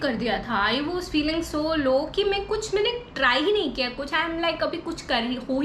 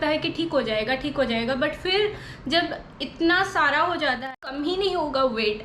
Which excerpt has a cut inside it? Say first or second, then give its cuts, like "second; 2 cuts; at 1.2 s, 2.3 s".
second; 1 cut; at 4.3 s